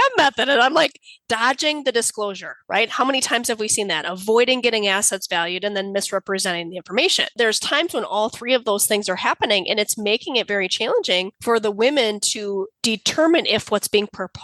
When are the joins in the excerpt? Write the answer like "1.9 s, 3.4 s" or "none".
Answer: 1.2 s, 7.3 s, 11.3 s, 12.7 s